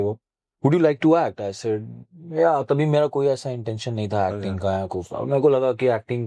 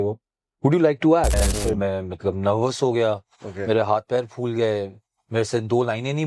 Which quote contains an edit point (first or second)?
second